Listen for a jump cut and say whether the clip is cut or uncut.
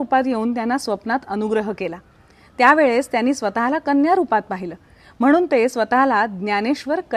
uncut